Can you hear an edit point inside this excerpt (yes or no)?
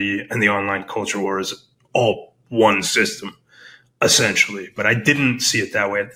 no